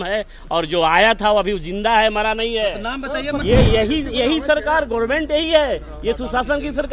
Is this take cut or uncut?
cut